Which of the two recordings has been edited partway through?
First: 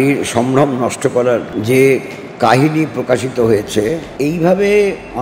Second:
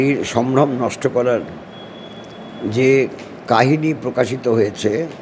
first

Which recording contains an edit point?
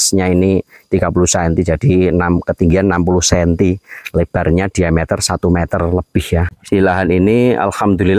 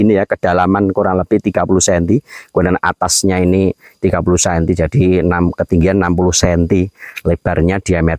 first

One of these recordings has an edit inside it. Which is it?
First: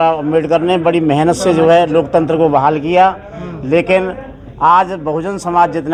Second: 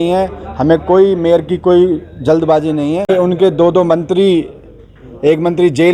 second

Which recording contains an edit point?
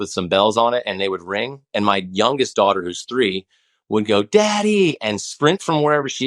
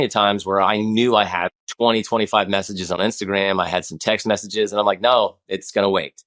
second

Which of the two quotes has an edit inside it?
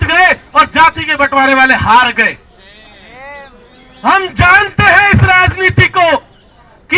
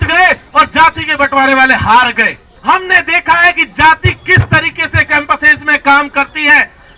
second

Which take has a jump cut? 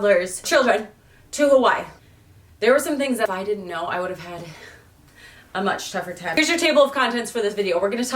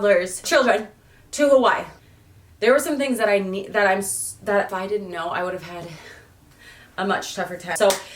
first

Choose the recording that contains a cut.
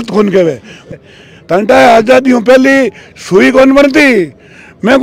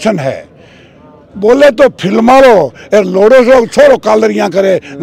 first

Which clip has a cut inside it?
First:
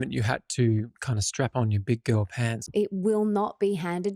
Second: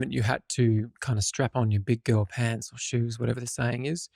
first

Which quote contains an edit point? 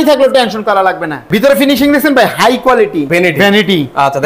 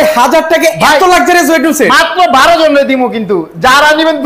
first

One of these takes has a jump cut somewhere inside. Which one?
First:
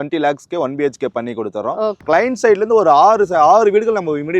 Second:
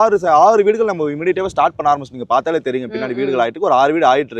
first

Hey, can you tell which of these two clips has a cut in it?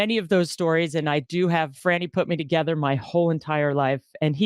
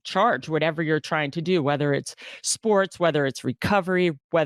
first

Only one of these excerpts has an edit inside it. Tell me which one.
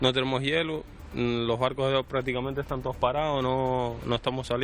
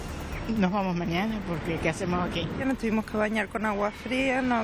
second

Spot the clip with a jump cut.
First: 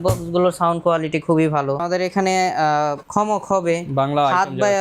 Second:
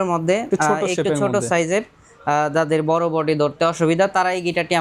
first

